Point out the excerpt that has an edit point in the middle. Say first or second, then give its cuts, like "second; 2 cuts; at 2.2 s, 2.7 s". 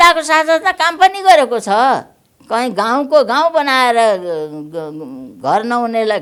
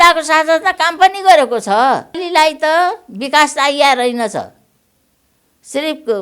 second; 1 cut; at 2.2 s